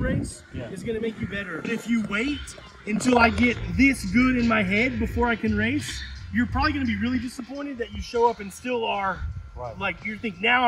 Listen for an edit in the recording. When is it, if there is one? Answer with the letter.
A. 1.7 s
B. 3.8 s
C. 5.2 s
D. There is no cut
A